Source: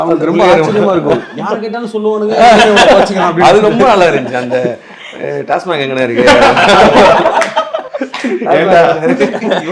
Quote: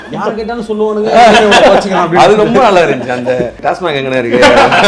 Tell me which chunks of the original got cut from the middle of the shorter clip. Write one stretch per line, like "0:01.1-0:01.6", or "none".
0:04.8-0:05.4